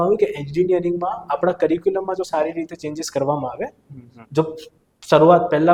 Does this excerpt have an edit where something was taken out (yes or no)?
no